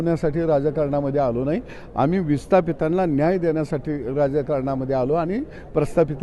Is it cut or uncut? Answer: uncut